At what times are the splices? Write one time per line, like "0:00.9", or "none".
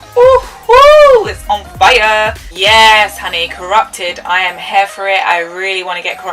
0:02.4